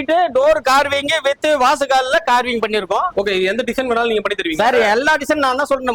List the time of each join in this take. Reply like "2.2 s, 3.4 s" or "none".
3.1 s

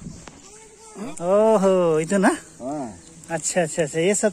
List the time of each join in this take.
1.1 s

